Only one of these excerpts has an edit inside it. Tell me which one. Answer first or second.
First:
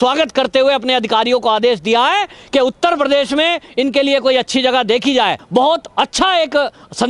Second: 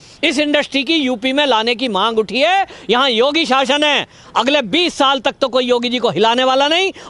first